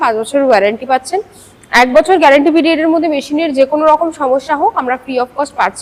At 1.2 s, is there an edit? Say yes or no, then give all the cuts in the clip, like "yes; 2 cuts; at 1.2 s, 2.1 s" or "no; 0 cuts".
no; 0 cuts